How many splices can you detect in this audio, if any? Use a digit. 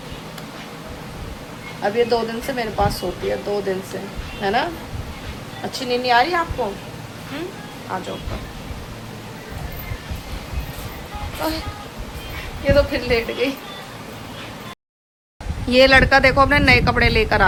0